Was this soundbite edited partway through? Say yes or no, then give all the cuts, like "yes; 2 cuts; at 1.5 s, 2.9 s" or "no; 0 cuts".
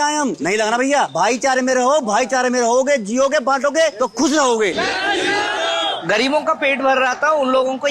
yes; 3 cuts; at 1.1 s, 4.7 s, 6.0 s